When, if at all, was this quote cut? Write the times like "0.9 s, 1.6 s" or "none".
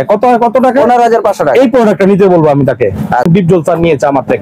3.3 s